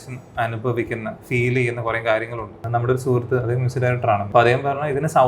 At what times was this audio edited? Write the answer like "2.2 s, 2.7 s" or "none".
2.6 s, 4.3 s